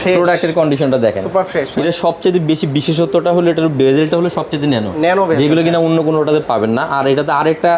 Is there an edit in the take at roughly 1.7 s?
yes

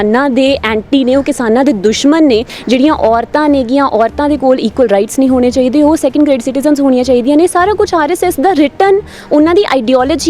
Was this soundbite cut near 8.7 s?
no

